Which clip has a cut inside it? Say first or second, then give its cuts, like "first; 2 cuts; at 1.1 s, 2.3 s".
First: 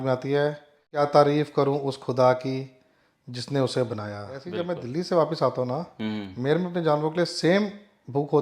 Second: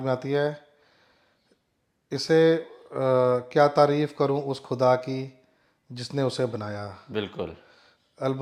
first; 2 cuts; at 1.0 s, 4.5 s